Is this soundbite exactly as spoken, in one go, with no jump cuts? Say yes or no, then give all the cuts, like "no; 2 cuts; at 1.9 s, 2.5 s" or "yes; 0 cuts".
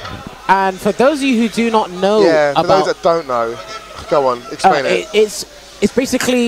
yes; 0 cuts